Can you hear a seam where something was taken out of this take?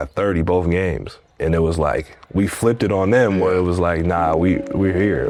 no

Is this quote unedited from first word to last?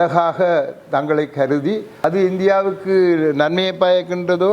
no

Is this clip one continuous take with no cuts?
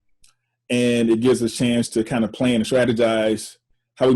yes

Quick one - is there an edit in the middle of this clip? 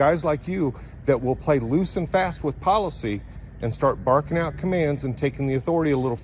no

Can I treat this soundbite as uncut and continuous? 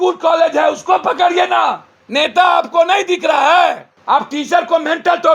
no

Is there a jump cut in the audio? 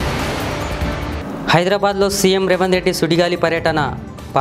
yes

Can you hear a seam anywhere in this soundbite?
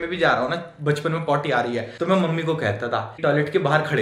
yes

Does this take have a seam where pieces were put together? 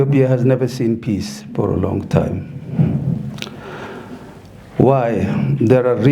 no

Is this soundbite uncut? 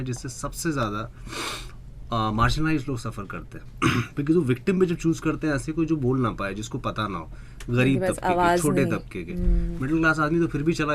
yes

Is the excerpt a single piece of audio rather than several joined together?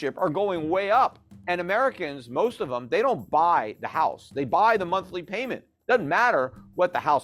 no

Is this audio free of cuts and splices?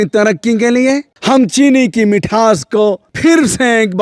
no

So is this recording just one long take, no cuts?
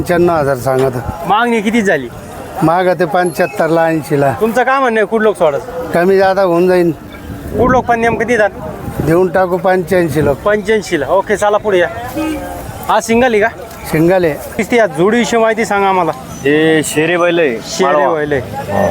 no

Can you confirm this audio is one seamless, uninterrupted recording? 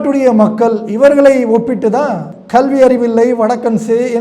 no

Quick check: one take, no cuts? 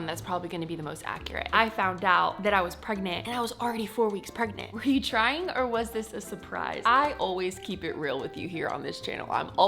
no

